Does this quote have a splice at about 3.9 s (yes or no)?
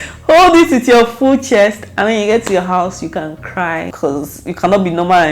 yes